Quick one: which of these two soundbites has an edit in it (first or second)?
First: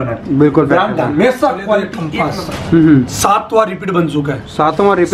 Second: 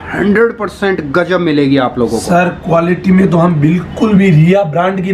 first